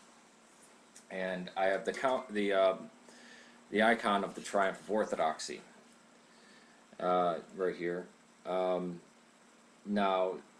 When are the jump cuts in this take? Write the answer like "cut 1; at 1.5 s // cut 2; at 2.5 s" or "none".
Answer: cut 1; at 9.1 s